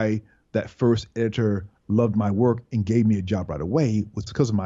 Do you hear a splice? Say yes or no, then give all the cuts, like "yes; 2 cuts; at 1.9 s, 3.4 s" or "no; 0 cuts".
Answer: no; 0 cuts